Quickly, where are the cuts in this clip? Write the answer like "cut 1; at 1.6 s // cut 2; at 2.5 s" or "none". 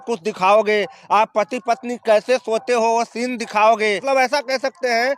cut 1; at 4.0 s